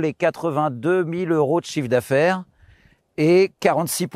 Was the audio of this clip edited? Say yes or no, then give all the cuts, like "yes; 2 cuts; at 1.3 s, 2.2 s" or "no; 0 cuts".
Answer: no; 0 cuts